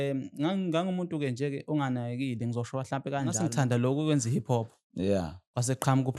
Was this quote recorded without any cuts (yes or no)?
no